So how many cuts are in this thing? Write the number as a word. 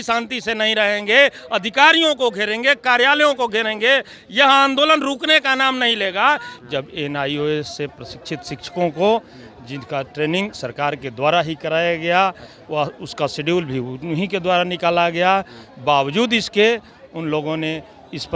one